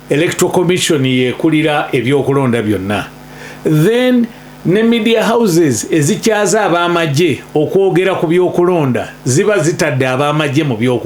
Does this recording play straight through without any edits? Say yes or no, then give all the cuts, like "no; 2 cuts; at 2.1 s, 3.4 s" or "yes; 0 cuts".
yes; 0 cuts